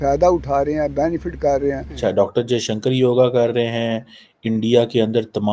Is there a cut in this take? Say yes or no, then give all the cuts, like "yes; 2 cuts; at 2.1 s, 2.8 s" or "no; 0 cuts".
yes; 1 cut; at 2.0 s